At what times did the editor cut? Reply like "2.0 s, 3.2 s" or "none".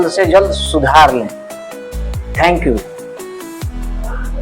2.8 s